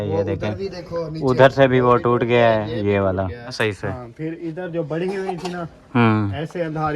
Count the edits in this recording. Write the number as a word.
one